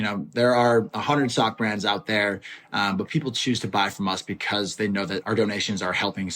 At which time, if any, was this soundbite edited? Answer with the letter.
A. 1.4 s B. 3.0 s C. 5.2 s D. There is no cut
C